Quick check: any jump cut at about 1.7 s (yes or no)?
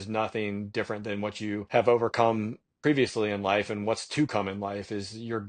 yes